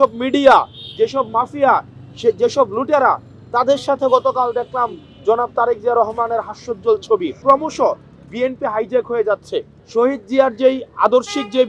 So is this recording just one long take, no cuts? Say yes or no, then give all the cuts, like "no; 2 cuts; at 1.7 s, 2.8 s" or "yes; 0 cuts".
no; 2 cuts; at 7.4 s, 9.8 s